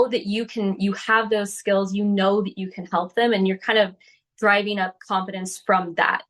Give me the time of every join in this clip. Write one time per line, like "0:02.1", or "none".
none